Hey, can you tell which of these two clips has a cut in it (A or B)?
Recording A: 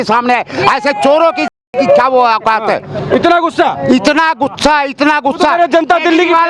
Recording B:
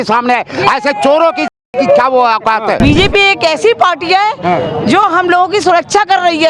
B